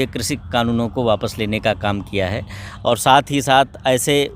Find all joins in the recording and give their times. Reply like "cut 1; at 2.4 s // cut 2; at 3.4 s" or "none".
cut 1; at 2.7 s